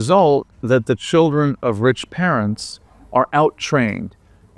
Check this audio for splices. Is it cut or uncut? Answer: uncut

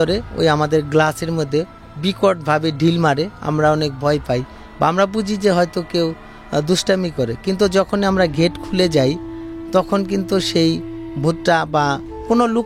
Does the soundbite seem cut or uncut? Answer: uncut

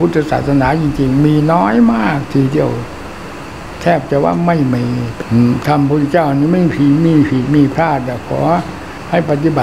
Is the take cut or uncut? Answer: cut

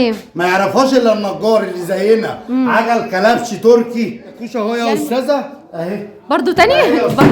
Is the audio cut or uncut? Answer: cut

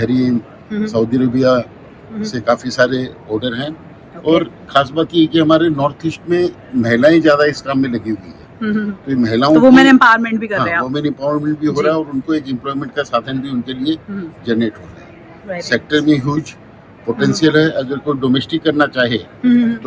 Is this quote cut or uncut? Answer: uncut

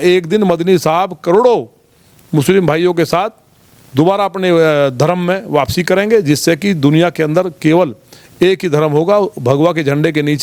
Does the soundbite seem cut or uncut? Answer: uncut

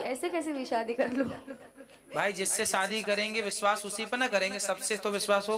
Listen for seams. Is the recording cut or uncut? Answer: uncut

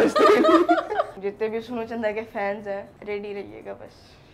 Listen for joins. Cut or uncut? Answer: cut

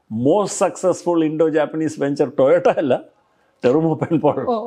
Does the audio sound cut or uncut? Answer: uncut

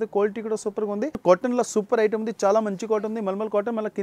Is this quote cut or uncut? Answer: cut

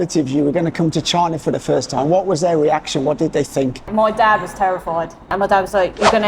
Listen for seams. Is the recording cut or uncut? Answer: cut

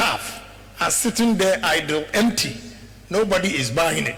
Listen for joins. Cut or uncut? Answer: uncut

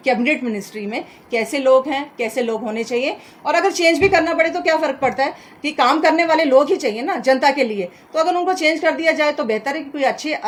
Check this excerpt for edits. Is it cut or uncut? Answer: uncut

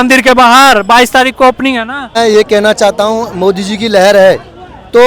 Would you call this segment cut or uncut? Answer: cut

